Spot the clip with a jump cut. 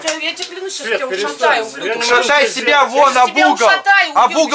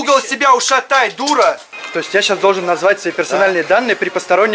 second; 1 cut; at 1.7 s

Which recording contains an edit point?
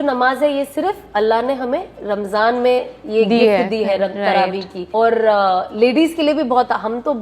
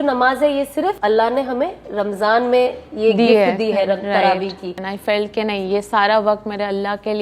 second; 2 cuts; at 1.0 s, 4.7 s

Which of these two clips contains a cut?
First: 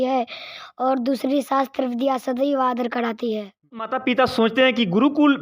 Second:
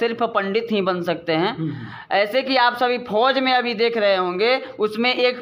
first; 1 cut; at 4.0 s

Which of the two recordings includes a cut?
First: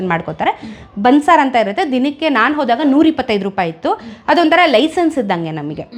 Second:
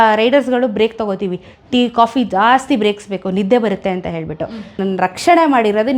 second; 1 cut; at 4.8 s

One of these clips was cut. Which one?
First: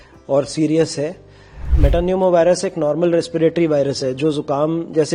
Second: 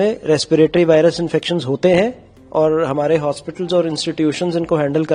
first; 1 cut; at 1.7 s

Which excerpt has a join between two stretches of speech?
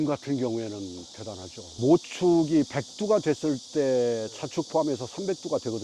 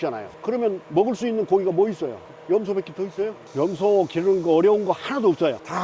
second; 1 cut; at 3.6 s

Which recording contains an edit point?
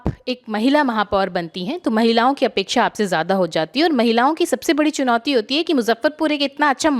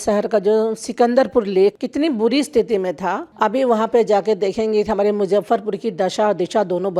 second; 2 cuts; at 1.8 s, 3.3 s

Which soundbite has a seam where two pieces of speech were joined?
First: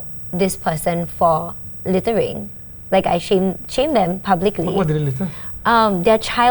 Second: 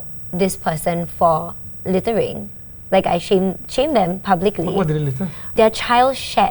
second; 1 cut; at 5.5 s

